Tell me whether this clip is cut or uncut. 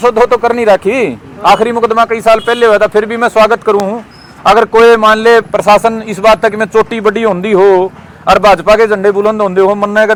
uncut